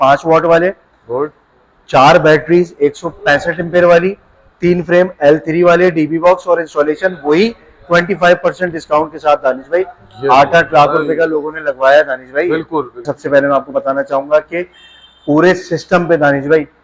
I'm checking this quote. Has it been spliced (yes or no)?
yes